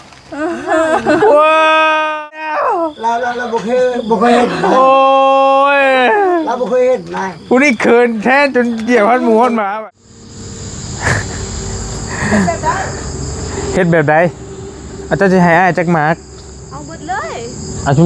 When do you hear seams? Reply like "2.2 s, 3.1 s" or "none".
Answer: 2.5 s, 9.7 s